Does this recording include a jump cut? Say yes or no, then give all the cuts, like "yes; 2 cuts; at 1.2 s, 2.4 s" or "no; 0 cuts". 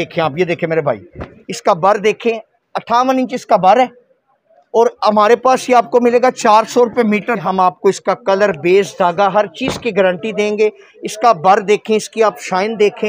yes; 1 cut; at 7.4 s